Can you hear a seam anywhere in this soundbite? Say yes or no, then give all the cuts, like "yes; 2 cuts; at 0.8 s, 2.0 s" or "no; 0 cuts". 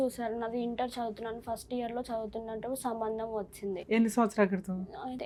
no; 0 cuts